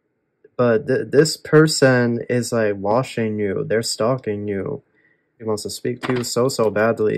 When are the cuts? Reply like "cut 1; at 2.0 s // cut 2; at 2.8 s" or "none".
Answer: cut 1; at 5.4 s